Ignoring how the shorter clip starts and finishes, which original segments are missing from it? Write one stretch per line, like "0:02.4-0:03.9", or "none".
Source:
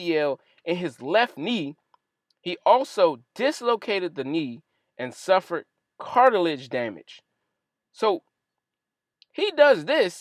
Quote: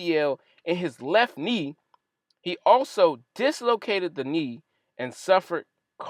none